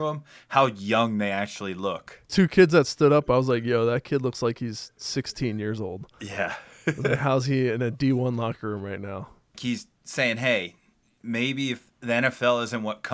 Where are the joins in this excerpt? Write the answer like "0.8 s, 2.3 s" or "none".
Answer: 2.3 s, 9.6 s